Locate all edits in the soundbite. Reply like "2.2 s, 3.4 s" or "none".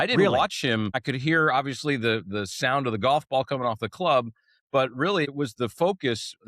1.0 s, 5.3 s